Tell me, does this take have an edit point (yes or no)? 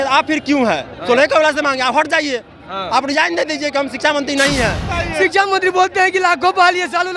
yes